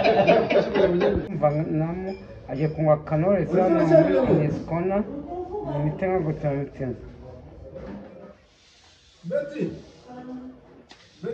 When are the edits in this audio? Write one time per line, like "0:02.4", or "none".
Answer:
0:01.3